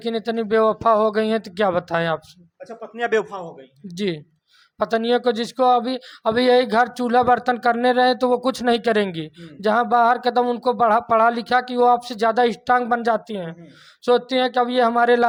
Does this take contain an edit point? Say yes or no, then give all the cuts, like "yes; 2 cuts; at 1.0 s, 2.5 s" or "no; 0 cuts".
no; 0 cuts